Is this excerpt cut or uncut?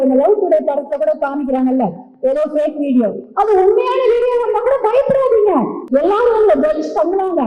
cut